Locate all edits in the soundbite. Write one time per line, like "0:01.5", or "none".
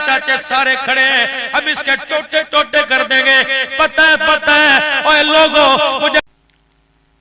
0:06.2